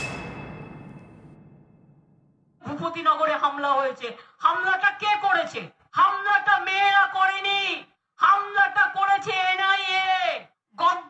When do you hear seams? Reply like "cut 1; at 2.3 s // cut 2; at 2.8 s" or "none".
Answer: cut 1; at 2.6 s